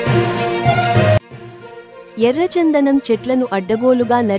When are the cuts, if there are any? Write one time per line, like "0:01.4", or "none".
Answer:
none